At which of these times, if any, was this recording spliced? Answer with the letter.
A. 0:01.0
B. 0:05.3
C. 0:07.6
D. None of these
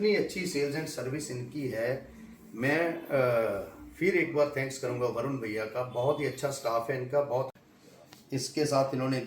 C